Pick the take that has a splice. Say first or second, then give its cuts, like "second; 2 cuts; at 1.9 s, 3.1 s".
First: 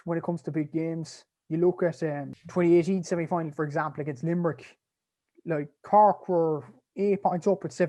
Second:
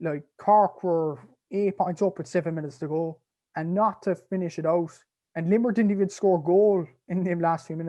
first; 1 cut; at 2.4 s